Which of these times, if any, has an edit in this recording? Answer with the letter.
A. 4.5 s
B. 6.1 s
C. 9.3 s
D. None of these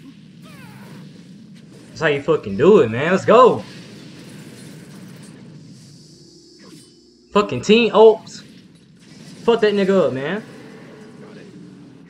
D